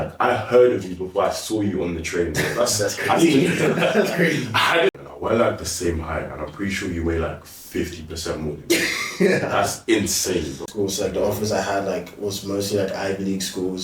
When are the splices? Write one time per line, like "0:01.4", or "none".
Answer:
0:04.9
0:10.7